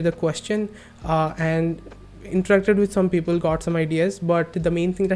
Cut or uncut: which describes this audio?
uncut